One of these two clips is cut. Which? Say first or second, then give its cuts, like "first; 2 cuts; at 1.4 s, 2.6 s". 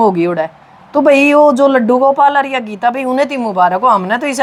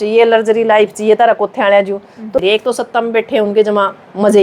second; 1 cut; at 2.4 s